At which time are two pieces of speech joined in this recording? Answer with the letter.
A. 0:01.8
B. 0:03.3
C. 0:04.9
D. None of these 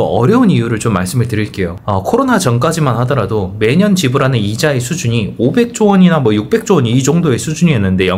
A